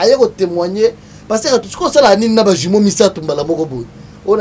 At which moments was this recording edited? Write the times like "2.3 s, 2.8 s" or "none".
none